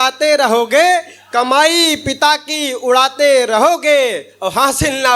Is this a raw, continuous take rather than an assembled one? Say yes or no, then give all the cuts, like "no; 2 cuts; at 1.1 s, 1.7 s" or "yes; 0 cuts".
yes; 0 cuts